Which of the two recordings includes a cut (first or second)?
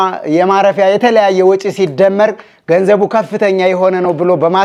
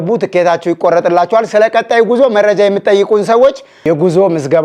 second